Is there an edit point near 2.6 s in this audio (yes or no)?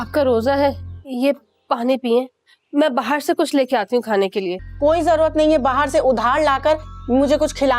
no